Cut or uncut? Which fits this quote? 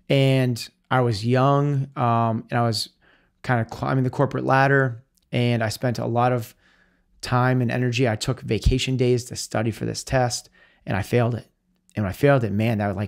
uncut